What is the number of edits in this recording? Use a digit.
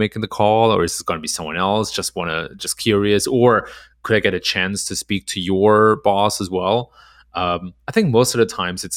0